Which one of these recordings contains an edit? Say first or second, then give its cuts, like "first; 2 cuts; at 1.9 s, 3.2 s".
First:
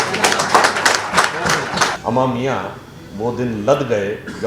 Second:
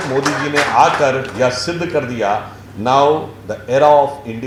first; 1 cut; at 2.0 s